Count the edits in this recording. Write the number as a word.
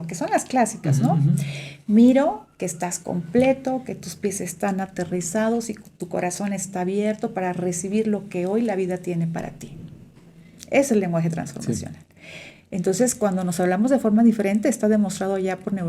zero